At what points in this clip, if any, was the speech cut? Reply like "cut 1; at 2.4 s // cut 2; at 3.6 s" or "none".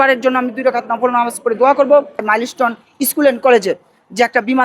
cut 1; at 2.2 s